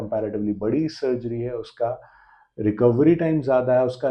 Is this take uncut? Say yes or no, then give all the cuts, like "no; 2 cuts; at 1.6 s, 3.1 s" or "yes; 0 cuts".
yes; 0 cuts